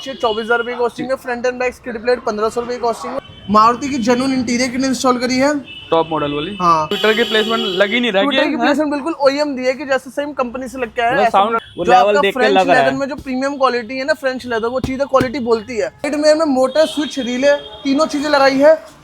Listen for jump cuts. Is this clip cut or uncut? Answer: cut